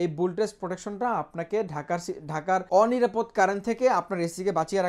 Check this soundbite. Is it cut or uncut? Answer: cut